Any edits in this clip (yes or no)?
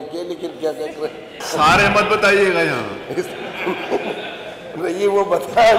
yes